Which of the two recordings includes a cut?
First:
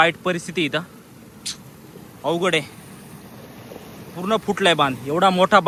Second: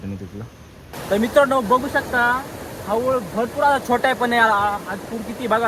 second; 1 cut; at 0.9 s

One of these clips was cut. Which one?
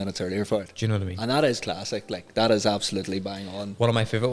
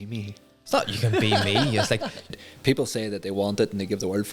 second; 1 cut; at 2.3 s

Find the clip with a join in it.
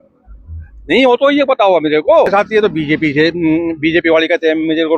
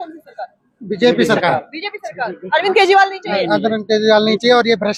first; 1 cut; at 2.3 s

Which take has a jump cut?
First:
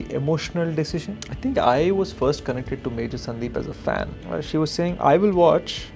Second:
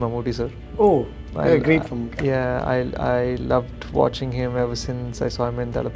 first; 2 cuts; at 1.2 s, 4.2 s

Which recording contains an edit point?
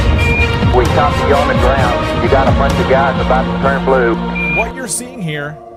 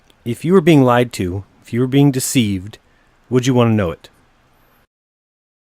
second; 1 cut; at 3.6 s

